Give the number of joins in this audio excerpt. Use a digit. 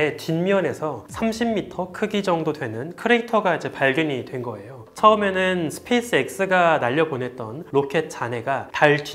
2